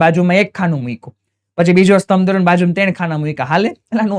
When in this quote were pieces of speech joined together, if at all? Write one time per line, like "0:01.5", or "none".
none